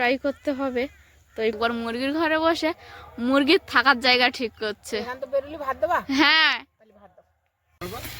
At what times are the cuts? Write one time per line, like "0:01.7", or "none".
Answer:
0:01.6